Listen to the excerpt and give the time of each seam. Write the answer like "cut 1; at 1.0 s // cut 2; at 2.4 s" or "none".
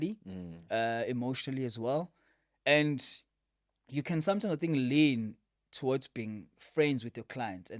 none